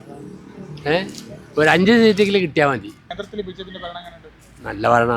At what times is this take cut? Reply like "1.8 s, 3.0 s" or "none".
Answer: 3.1 s